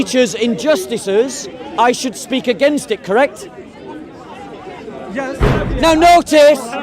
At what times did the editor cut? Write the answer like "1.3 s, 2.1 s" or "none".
5.6 s